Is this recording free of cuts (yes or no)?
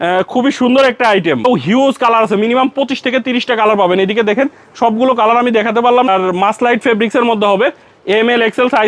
no